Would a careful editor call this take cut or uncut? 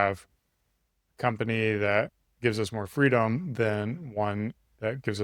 uncut